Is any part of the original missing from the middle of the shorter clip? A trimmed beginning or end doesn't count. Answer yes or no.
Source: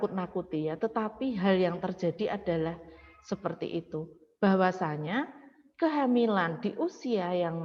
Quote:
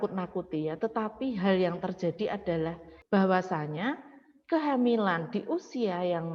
yes